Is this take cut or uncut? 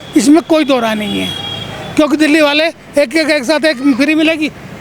uncut